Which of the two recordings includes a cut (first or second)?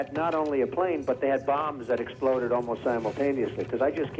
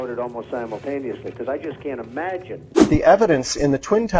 second